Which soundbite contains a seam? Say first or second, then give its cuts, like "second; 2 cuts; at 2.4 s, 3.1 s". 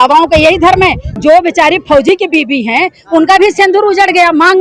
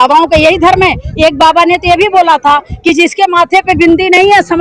first; 1 cut; at 1.1 s